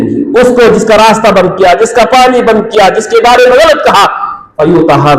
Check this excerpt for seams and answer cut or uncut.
uncut